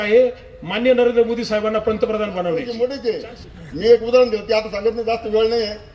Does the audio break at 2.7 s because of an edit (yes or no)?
yes